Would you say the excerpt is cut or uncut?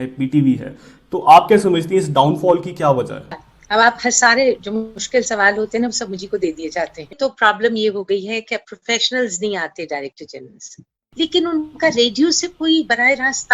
cut